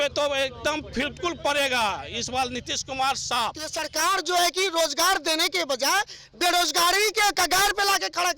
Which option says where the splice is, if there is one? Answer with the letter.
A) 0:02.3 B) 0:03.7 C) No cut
B